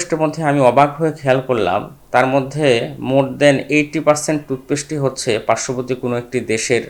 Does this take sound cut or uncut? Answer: uncut